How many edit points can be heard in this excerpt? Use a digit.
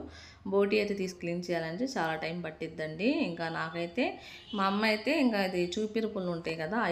1